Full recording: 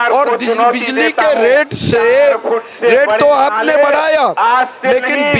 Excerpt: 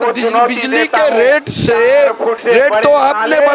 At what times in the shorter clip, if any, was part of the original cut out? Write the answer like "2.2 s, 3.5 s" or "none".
2.4 s